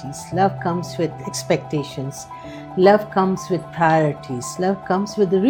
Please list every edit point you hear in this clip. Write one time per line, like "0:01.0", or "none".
none